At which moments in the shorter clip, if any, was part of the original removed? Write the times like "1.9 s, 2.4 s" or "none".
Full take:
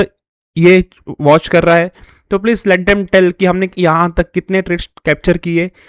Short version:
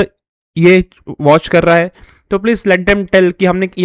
none